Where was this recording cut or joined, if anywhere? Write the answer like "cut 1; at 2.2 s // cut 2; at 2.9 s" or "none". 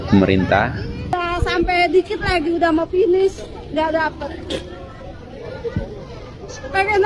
cut 1; at 0.9 s